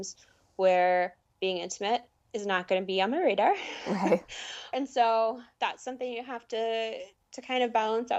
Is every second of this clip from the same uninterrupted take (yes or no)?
no